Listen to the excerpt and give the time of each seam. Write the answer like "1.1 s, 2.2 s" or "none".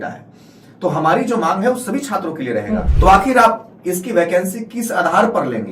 2.9 s